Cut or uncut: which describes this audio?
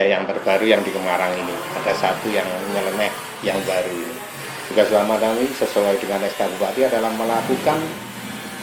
cut